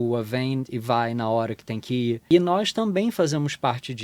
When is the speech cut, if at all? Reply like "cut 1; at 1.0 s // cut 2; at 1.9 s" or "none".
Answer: cut 1; at 2.2 s